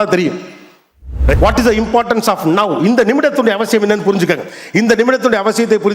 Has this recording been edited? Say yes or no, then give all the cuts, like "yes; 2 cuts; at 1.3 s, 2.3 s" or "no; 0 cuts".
yes; 1 cut; at 1.4 s